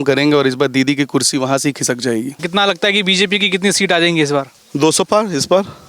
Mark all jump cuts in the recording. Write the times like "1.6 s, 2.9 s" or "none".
2.4 s